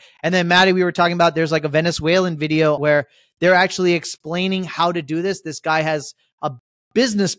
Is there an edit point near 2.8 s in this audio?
yes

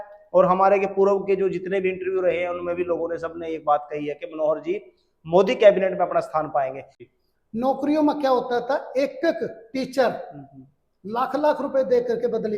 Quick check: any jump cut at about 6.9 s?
yes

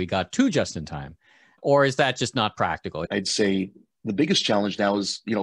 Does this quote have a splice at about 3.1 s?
yes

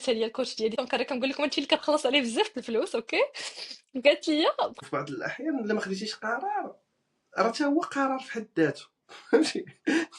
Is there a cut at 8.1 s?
no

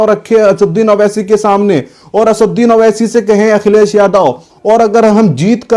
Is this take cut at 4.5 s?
yes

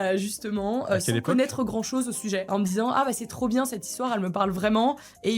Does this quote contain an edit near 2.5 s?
yes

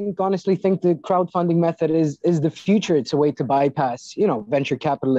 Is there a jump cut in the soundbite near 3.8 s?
no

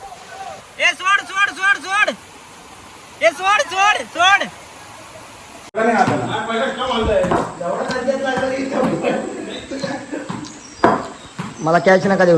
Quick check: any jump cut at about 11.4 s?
no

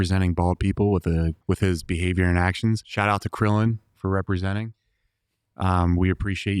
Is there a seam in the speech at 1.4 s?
yes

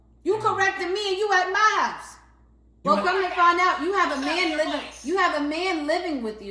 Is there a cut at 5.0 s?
no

